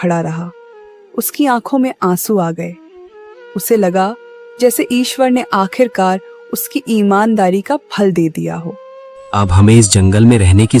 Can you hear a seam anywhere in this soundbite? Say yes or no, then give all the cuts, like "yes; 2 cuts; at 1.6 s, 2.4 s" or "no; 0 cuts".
no; 0 cuts